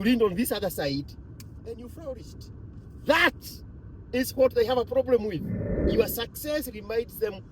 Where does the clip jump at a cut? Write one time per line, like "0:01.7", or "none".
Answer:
0:05.9

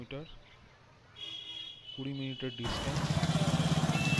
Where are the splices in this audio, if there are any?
0:02.9

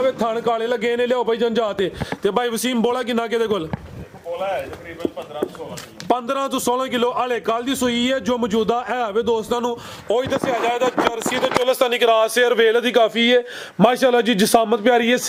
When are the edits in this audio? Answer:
none

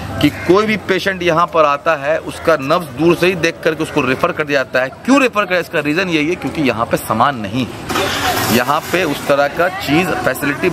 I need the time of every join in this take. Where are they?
none

